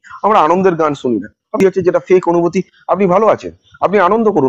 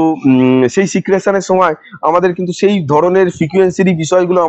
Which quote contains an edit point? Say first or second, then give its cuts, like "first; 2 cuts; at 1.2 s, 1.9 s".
first; 1 cut; at 1.6 s